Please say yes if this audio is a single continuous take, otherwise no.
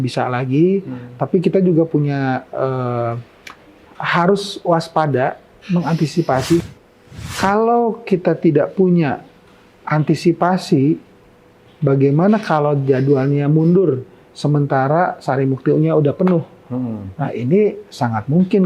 no